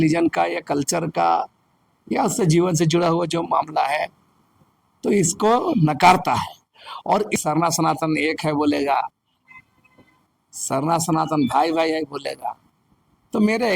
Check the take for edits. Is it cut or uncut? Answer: cut